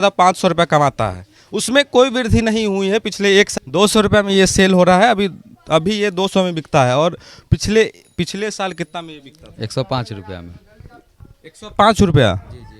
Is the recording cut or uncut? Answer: cut